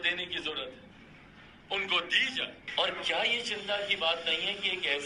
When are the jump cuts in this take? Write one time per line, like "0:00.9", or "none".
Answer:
none